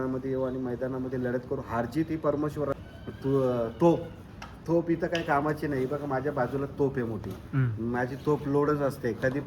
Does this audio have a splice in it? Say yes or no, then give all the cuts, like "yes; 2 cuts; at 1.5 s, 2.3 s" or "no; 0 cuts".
yes; 1 cut; at 2.8 s